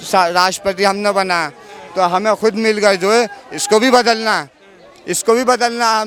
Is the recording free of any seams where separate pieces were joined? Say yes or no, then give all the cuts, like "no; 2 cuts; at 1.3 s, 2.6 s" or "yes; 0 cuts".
yes; 0 cuts